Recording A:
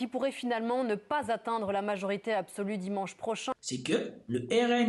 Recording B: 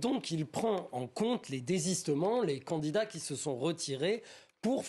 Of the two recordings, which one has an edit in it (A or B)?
A